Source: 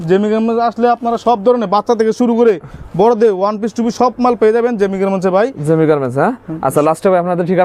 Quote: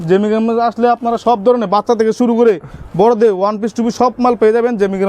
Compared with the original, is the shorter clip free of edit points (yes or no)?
yes